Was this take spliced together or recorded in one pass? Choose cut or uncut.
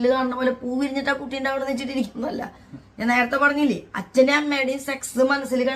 uncut